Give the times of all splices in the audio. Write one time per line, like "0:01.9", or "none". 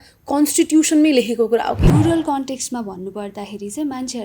0:01.9